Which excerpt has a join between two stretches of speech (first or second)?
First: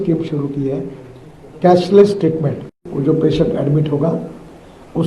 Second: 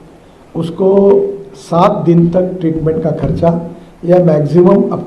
first